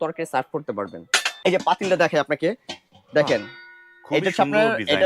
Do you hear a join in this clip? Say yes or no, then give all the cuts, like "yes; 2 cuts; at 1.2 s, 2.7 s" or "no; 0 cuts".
yes; 1 cut; at 1.3 s